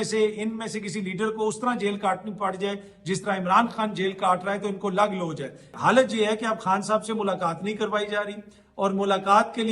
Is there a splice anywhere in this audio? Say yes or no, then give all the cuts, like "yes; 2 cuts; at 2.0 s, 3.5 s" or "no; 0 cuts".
yes; 1 cut; at 5.8 s